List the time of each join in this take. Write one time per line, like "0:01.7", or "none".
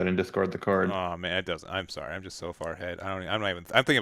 none